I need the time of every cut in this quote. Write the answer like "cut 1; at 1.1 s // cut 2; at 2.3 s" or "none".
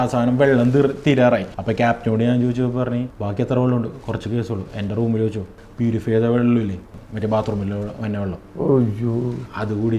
cut 1; at 1.6 s // cut 2; at 3.2 s // cut 3; at 5.6 s // cut 4; at 6.8 s